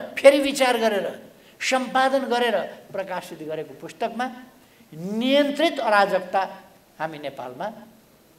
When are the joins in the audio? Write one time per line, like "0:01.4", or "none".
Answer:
none